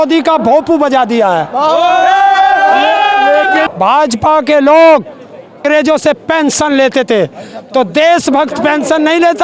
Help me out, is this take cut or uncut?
cut